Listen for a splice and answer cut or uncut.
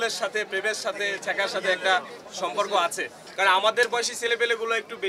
cut